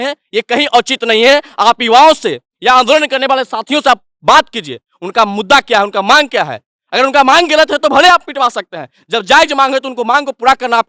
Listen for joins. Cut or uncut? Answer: uncut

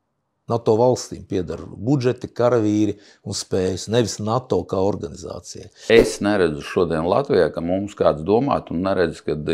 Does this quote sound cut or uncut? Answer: cut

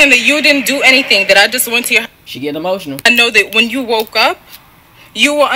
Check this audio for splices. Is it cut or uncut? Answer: cut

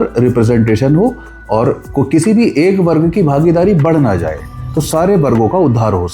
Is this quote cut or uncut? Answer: uncut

